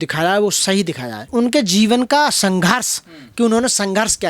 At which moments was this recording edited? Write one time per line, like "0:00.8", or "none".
0:01.3